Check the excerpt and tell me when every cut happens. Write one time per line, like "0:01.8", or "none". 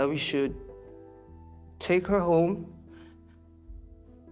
none